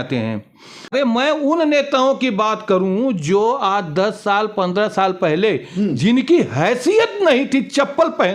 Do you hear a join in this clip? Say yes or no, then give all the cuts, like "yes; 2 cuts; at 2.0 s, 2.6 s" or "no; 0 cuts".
yes; 1 cut; at 0.9 s